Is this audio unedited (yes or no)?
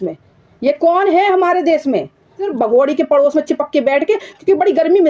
no